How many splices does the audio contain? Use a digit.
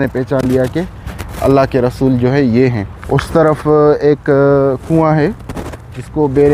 1